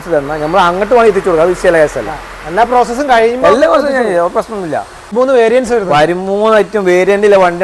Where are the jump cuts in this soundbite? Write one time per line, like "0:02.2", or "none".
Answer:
0:05.0